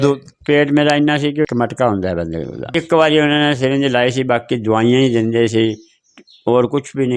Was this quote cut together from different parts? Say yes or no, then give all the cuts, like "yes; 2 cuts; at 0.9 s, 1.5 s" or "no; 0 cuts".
yes; 2 cuts; at 1.5 s, 2.7 s